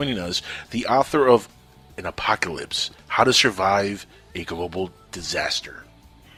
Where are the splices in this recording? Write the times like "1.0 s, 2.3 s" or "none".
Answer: none